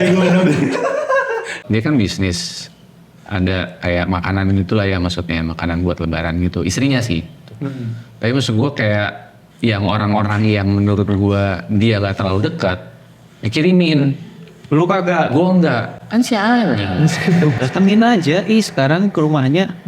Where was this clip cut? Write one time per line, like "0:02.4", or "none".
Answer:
0:01.6
0:17.6